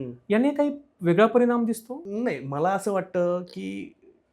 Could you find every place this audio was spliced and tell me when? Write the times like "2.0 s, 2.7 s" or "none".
1.9 s